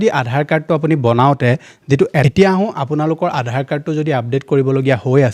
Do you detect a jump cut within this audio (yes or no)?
yes